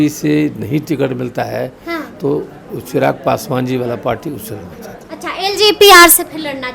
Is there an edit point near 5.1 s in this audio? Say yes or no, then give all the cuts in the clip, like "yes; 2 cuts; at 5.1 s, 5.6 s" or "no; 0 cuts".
no; 0 cuts